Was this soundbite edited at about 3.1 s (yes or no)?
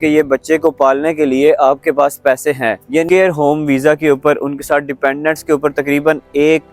yes